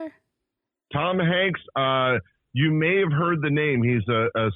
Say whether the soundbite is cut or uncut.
uncut